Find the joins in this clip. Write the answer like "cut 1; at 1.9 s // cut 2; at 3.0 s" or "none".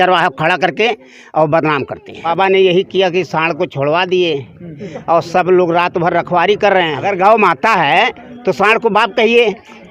cut 1; at 2.2 s // cut 2; at 7.0 s

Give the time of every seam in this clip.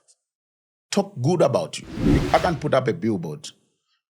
cut 1; at 2.1 s

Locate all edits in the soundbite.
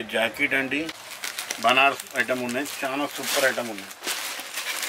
cut 1; at 1.1 s

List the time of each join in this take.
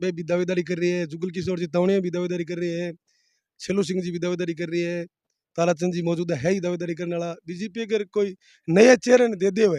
none

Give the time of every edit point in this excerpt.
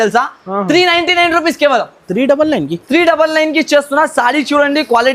none

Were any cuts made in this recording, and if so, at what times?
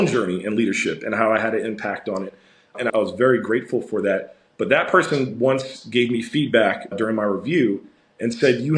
cut 1; at 2.8 s // cut 2; at 6.9 s

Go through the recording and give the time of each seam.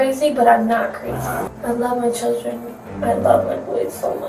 cut 1; at 1.5 s

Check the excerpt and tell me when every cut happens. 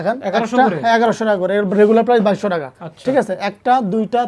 none

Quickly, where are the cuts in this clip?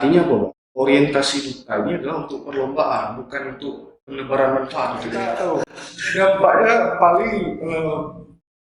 cut 1; at 5.4 s

